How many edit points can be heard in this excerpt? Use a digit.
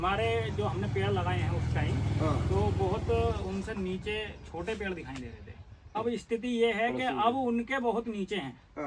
1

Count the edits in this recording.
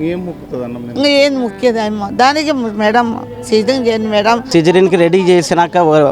1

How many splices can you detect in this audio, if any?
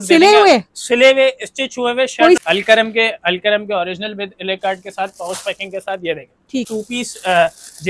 2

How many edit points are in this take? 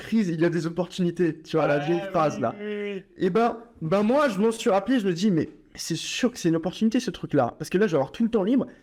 0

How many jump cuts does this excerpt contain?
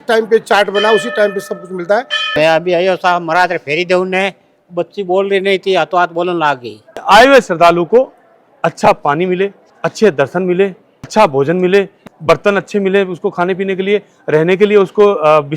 3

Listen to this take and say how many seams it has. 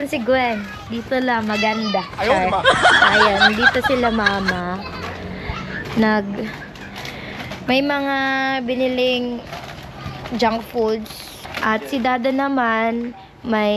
1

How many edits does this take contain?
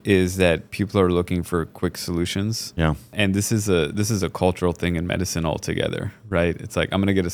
0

